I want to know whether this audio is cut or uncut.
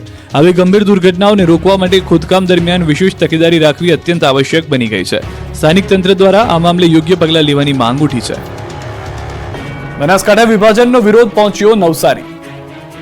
cut